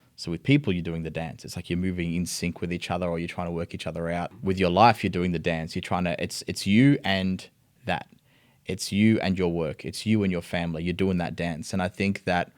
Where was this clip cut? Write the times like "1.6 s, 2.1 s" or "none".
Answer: 4.4 s